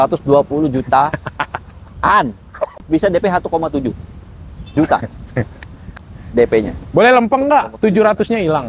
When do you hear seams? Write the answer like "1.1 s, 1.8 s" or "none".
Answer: 2.8 s